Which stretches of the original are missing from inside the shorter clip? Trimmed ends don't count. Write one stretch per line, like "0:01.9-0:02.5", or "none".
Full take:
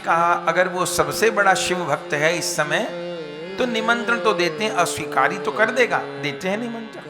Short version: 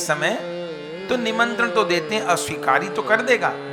none

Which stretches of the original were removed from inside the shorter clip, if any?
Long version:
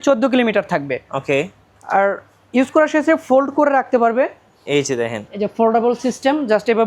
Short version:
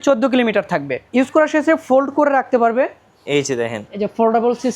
0:01.0-0:02.4

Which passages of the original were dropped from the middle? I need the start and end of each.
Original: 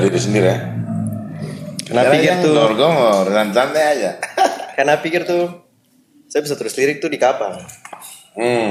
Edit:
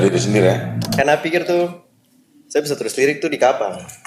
0:00.9-0:04.7

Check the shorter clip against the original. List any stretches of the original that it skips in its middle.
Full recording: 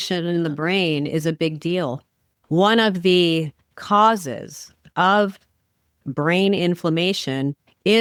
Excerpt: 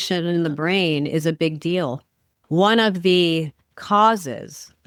none

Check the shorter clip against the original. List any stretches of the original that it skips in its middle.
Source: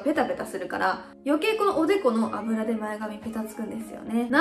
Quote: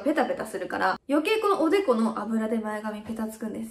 0:01.0-0:01.2

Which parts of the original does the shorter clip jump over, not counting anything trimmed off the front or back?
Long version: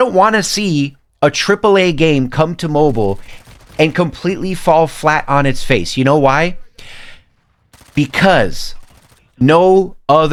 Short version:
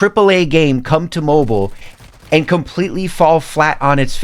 none

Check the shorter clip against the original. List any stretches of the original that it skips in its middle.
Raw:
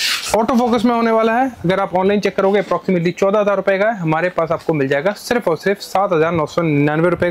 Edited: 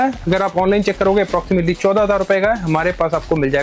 none

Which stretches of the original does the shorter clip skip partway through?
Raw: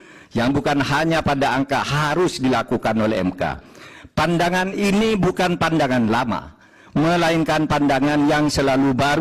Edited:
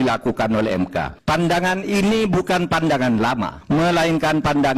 0:03.6-0:04.0
0:06.4-0:06.8

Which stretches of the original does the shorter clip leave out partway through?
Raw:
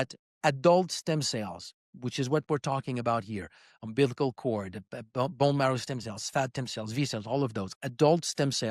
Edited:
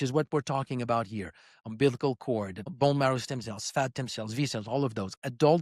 0:04.9-0:05.3

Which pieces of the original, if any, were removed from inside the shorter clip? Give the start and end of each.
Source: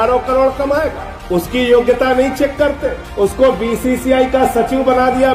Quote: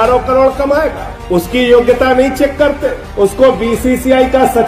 none

